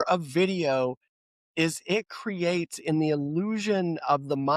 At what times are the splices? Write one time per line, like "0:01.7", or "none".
none